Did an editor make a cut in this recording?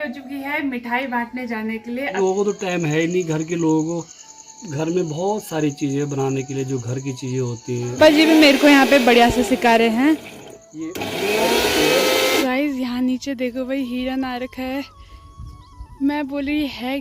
yes; 3 cuts; at 2.1 s, 8.0 s, 12.4 s

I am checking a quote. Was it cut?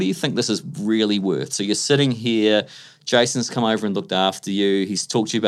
no; 0 cuts

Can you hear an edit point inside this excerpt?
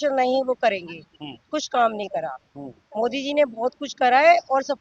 no; 0 cuts

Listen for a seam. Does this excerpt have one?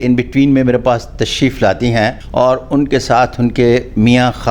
yes; 1 cut; at 2.2 s

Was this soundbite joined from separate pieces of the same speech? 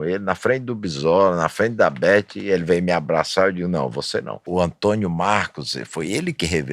yes; 1 cut; at 4.4 s

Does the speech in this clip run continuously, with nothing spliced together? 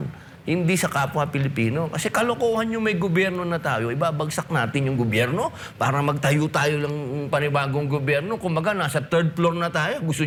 yes; 0 cuts

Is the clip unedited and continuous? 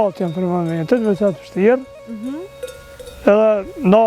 yes; 0 cuts

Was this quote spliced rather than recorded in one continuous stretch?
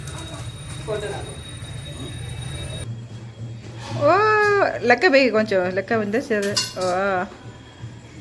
yes; 1 cut; at 2.8 s

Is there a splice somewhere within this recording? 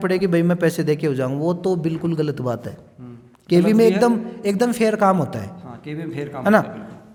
no; 0 cuts

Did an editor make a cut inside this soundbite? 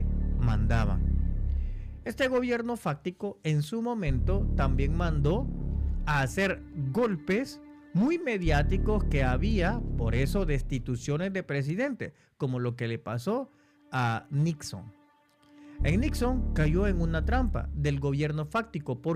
no; 0 cuts

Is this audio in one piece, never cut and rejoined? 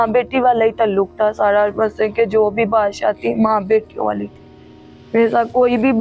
yes; 0 cuts

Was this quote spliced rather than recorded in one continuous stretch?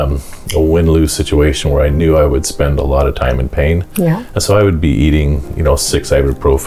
no; 0 cuts

